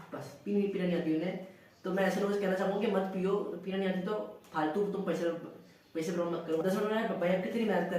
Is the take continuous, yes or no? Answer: no